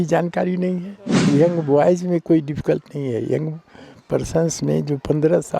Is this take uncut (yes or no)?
no